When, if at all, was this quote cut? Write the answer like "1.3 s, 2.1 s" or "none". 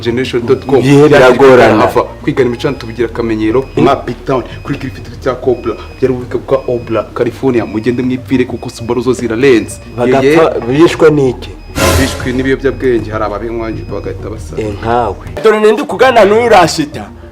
15.4 s

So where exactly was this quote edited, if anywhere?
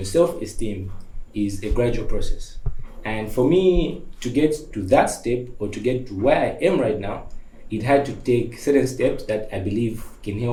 none

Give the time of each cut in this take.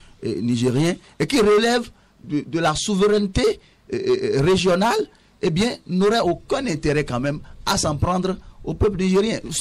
none

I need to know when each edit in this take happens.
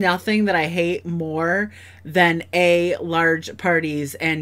none

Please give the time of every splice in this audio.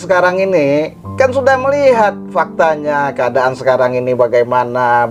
none

